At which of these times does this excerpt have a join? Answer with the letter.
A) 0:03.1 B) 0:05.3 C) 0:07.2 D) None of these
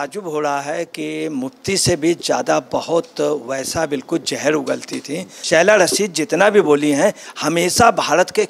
D